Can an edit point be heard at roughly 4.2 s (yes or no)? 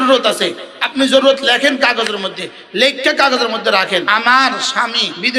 no